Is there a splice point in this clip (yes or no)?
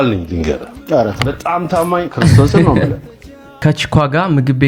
yes